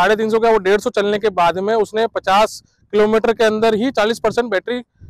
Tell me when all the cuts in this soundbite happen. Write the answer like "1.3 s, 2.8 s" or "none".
none